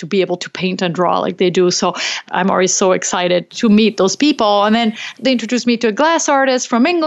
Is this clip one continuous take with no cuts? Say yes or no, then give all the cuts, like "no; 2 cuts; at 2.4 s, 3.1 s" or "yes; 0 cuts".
no; 3 cuts; at 2.2 s, 3.5 s, 5.1 s